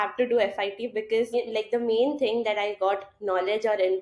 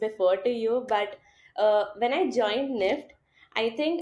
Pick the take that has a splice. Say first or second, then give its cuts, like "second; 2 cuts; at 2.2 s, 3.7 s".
first; 1 cut; at 1.3 s